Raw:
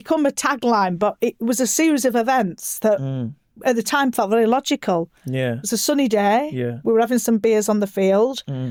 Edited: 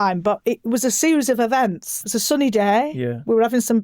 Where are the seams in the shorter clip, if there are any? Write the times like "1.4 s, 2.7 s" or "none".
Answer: 2.0 s